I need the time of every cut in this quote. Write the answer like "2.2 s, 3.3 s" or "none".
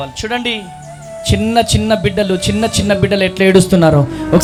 none